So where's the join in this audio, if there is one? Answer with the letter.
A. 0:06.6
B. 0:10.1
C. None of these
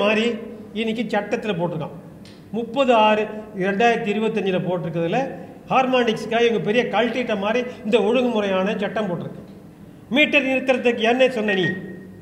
C